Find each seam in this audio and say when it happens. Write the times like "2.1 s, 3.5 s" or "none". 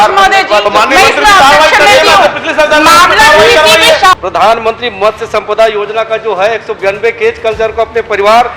4.1 s

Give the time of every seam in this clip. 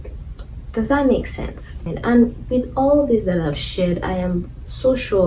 1.9 s

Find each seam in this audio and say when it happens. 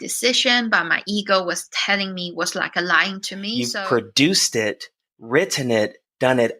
3.6 s

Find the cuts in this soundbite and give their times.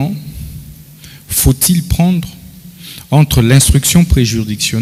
none

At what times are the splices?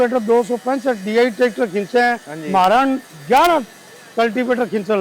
none

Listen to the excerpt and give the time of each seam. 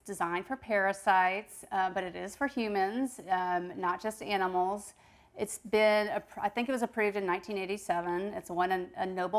none

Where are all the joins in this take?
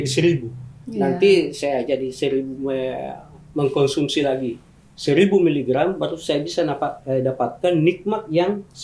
none

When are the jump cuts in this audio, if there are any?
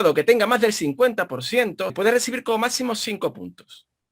1.9 s

